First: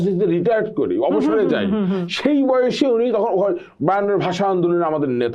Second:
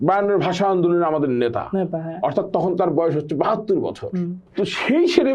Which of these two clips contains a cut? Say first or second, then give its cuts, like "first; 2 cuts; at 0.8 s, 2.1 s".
second; 1 cut; at 4.4 s